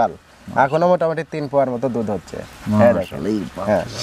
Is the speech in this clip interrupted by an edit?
no; 0 cuts

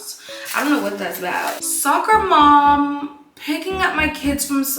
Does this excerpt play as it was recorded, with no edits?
no; 1 cut; at 1.7 s

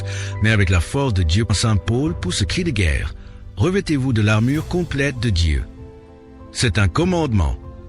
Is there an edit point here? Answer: yes; 1 cut; at 1.5 s

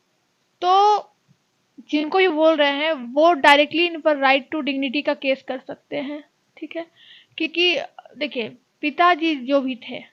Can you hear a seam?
no; 0 cuts

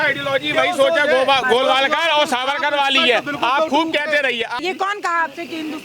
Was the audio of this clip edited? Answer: yes; 1 cut; at 4.6 s

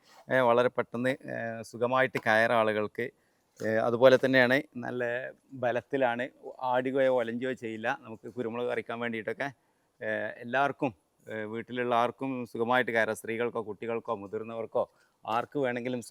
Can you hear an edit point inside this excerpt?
no; 0 cuts

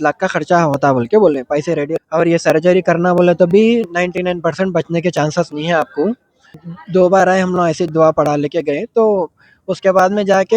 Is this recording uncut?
no; 2 cuts; at 1.9 s, 6.6 s

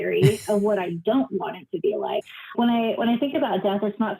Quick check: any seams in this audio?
yes; 1 cut; at 2.2 s

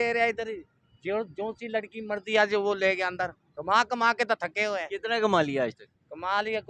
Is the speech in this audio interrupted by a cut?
yes; 1 cut; at 3.5 s

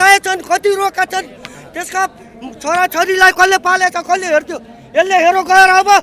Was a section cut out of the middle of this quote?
no; 0 cuts

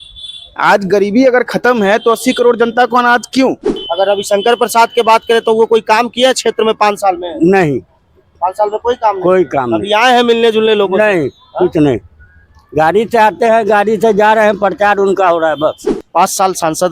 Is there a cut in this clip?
yes; 2 cuts; at 3.7 s, 15.9 s

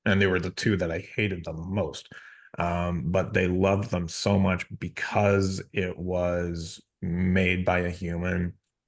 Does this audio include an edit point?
yes; 1 cut; at 2.1 s

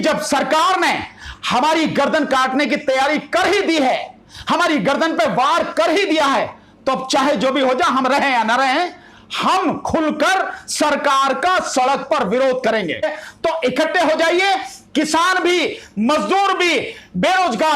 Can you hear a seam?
yes; 1 cut; at 13.0 s

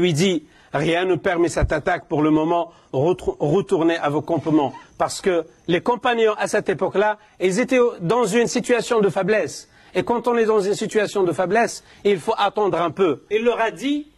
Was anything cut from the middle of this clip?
yes; 1 cut; at 13.2 s

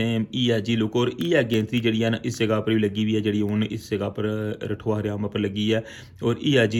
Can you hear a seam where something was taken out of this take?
no; 0 cuts

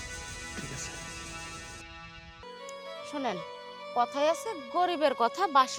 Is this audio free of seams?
no; 1 cut; at 2.5 s

